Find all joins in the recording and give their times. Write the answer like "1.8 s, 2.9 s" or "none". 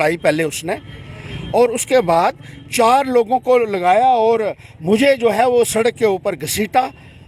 none